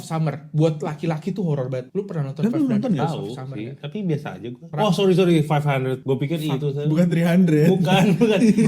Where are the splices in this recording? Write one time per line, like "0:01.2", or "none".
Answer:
0:01.9
0:04.7
0:06.0